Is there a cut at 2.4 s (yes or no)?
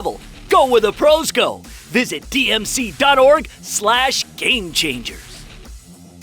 no